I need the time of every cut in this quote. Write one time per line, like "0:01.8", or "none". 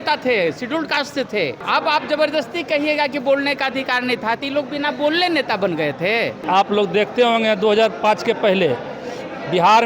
0:01.6
0:06.4